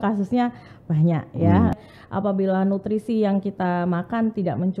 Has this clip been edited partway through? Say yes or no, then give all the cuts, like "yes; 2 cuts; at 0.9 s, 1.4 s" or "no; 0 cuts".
yes; 1 cut; at 1.8 s